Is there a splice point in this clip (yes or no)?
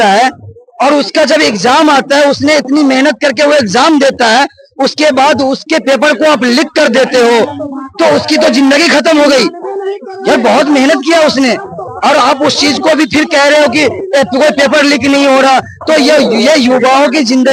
no